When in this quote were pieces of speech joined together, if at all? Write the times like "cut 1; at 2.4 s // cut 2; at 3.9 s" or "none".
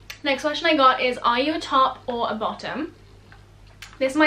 none

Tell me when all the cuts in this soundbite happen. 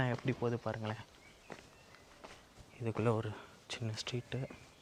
none

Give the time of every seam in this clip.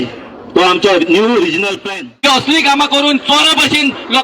cut 1; at 1.8 s

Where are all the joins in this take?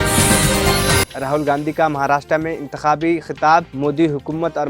cut 1; at 1.1 s

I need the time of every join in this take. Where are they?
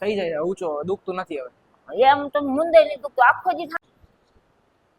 cut 1; at 3.7 s

